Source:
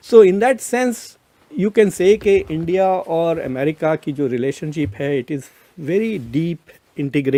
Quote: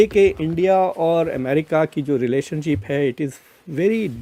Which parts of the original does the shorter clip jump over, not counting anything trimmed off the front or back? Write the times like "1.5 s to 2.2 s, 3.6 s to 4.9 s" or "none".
none